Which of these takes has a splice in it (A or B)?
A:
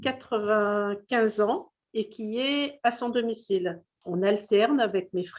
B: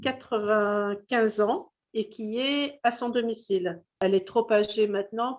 A